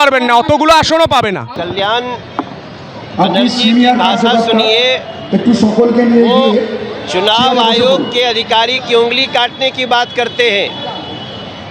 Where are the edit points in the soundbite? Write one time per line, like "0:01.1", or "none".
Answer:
0:01.5